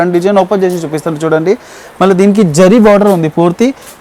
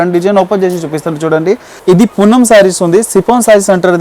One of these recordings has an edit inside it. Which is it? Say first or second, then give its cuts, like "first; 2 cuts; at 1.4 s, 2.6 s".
second; 1 cut; at 1.7 s